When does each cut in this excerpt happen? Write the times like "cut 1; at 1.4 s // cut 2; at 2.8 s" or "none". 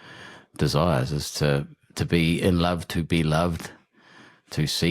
cut 1; at 1.8 s